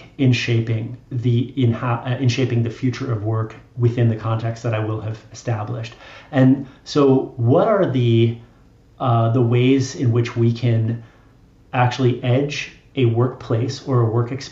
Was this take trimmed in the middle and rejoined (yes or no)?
no